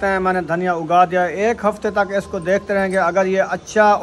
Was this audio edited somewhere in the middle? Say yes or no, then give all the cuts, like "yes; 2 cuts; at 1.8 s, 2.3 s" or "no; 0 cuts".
no; 0 cuts